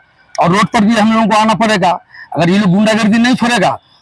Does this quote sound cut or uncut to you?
uncut